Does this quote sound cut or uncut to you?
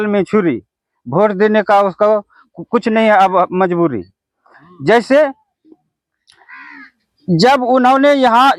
uncut